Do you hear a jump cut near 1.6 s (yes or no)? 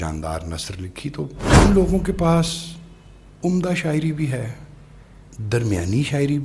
yes